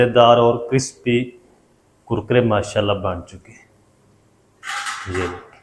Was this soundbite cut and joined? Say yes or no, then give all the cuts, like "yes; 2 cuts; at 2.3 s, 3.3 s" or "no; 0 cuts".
no; 0 cuts